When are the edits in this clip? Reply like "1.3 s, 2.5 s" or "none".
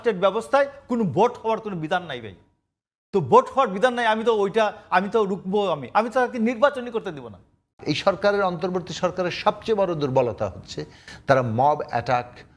7.8 s